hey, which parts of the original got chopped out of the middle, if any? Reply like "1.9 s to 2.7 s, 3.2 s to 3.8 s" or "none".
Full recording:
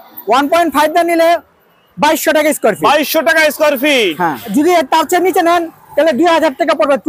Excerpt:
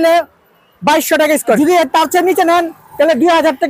2.7 s to 4.5 s